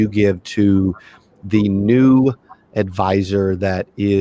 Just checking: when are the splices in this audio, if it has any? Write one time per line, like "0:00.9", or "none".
none